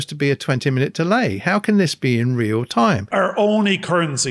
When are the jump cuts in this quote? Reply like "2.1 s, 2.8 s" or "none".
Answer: 3.1 s